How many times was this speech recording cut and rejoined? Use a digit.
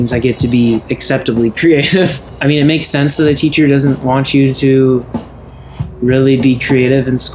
1